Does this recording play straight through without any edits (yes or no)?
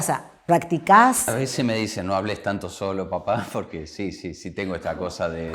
no